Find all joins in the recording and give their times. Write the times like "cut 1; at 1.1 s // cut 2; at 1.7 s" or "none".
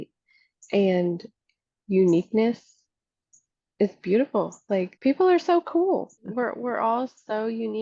cut 1; at 4.9 s // cut 2; at 6.2 s